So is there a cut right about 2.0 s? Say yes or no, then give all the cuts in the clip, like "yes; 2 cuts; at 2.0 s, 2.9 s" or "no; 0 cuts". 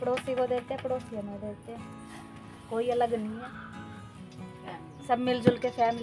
no; 2 cuts; at 3.5 s, 4.6 s